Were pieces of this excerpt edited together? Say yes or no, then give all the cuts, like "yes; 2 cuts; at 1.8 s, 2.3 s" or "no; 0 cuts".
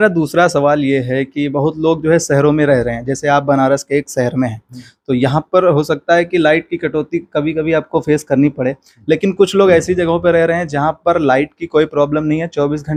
no; 0 cuts